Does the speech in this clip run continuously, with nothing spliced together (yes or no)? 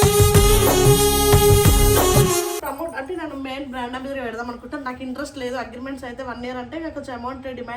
no